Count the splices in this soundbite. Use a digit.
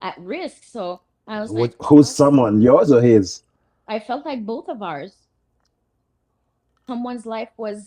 1